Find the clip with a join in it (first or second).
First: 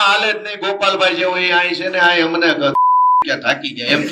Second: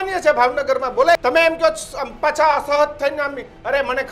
second